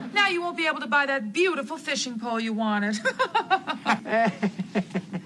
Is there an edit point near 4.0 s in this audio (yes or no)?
yes